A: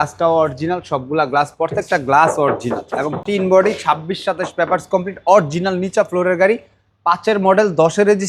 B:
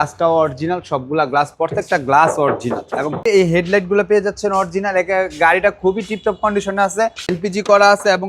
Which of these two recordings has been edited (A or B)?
B